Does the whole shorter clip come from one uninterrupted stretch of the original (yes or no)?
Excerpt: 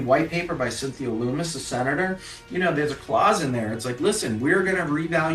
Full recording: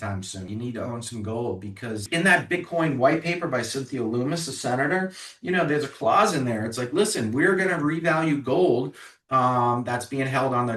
yes